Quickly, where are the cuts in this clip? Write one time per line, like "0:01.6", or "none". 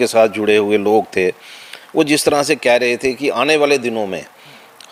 none